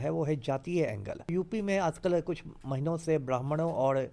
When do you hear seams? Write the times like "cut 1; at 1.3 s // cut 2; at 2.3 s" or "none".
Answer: cut 1; at 1.3 s